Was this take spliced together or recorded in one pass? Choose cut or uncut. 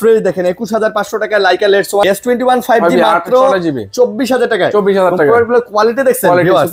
cut